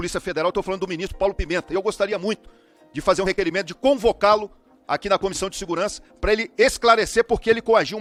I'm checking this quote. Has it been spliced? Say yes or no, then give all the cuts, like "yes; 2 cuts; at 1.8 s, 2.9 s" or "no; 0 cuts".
no; 0 cuts